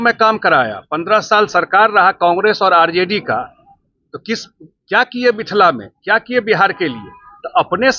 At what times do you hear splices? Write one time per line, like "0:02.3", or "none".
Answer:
none